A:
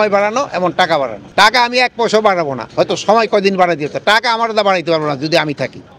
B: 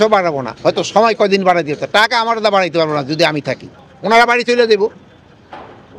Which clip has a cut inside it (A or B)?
A